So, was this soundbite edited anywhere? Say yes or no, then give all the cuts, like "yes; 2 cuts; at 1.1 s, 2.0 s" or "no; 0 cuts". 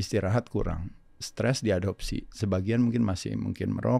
no; 0 cuts